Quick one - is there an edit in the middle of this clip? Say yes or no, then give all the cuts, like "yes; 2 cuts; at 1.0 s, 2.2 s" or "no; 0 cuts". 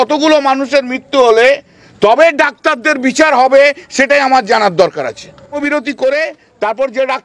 yes; 1 cut; at 5.6 s